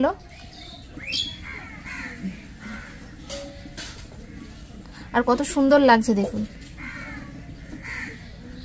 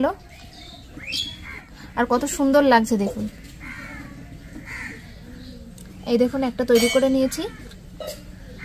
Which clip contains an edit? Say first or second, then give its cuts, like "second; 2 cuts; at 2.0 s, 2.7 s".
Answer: second; 1 cut; at 1.7 s